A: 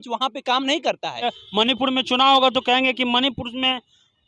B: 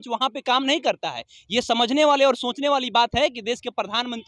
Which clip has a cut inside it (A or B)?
A